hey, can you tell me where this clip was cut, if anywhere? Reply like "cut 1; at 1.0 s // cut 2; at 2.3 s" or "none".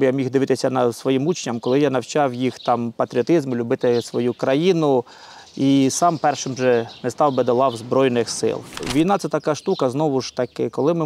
cut 1; at 8.7 s